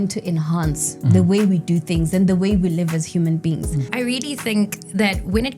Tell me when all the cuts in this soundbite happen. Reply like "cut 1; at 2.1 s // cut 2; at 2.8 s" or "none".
cut 1; at 3.9 s